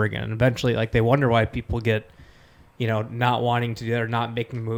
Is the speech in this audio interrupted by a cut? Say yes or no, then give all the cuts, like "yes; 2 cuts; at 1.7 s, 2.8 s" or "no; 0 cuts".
no; 0 cuts